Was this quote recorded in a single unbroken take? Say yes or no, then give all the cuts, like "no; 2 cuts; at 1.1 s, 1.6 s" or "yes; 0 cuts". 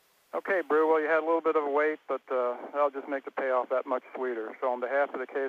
yes; 0 cuts